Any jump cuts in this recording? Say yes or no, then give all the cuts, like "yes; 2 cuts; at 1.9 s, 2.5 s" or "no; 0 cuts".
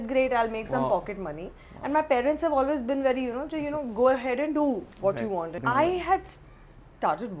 yes; 1 cut; at 5.5 s